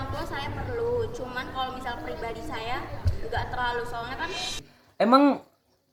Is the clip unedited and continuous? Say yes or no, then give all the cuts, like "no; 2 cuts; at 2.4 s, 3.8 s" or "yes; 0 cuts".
no; 1 cut; at 4.8 s